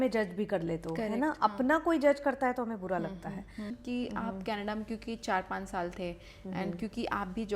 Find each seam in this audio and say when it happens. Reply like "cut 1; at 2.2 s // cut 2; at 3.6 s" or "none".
cut 1; at 3.8 s